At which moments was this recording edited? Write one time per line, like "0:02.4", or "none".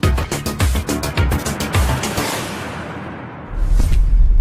0:00.9